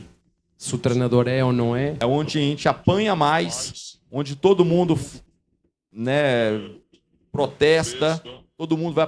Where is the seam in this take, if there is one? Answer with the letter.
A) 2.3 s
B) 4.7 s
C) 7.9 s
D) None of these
A